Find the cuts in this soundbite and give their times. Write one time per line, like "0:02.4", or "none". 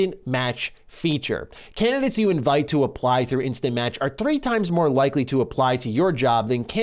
none